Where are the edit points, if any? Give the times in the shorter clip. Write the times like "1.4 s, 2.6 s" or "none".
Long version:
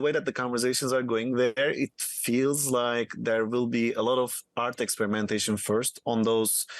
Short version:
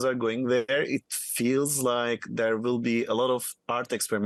none